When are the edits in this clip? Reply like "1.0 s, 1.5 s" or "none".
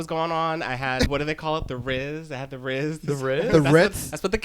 1.1 s